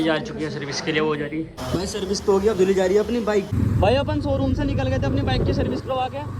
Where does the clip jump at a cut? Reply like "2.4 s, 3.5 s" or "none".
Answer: none

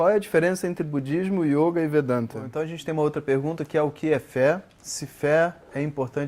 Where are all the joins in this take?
2.4 s

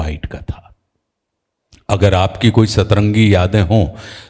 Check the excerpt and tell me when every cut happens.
none

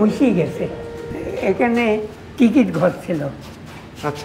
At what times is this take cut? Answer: 1.0 s

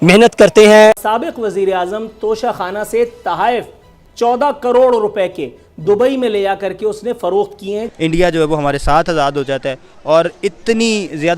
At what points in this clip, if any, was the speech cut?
1.0 s, 7.9 s

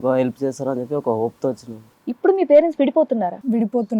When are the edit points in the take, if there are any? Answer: 1.9 s

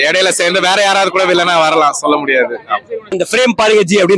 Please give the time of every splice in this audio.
3.1 s

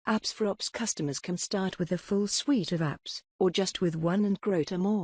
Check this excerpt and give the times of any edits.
3.7 s

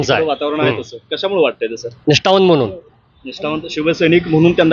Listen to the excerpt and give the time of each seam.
none

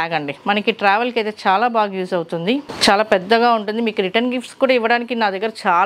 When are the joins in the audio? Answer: 2.7 s

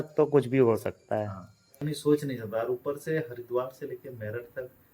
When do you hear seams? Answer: 1.9 s

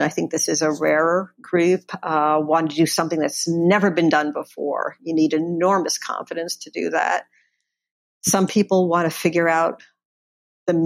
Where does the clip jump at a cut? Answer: none

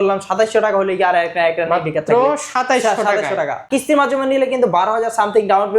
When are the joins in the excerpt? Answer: 3.7 s

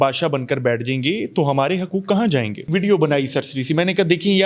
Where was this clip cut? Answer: 2.7 s

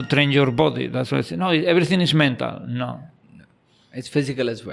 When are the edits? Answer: none

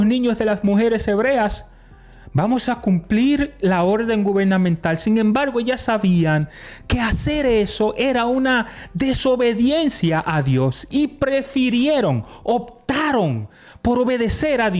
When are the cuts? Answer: none

